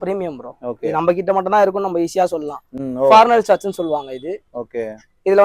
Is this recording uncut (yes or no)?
yes